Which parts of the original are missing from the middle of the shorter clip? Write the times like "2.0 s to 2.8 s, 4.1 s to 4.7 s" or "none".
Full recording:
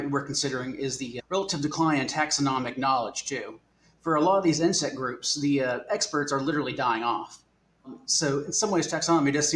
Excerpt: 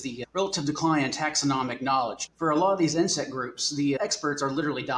3.2 s to 3.9 s, 5.6 s to 5.9 s